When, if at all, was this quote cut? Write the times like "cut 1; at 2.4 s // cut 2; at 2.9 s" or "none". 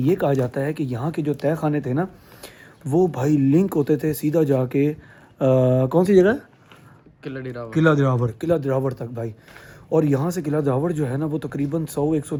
none